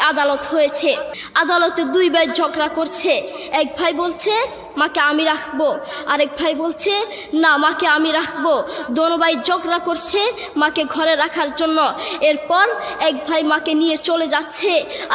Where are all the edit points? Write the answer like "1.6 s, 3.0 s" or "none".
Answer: 1.2 s